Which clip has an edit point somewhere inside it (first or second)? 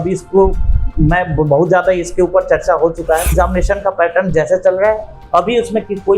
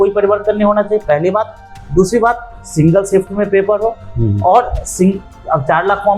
first